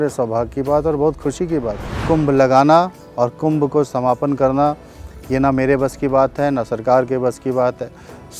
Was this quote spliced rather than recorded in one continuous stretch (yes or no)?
yes